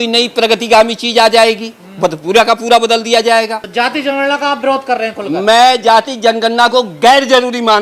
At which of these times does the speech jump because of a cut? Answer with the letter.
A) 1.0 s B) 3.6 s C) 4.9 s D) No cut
B